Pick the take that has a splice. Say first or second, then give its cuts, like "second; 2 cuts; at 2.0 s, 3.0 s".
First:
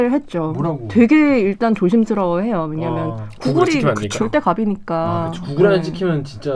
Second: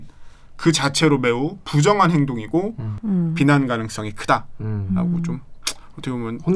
second; 1 cut; at 3.0 s